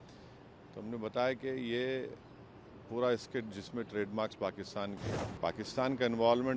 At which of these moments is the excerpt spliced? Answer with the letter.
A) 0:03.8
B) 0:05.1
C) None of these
B